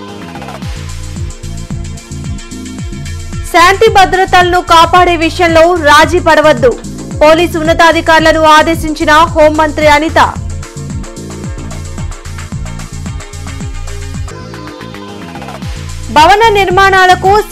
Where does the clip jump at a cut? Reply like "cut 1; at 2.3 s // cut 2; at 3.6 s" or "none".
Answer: cut 1; at 1.0 s